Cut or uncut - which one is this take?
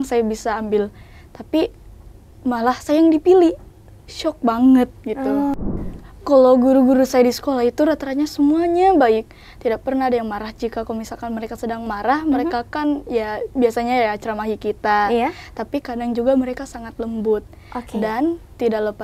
cut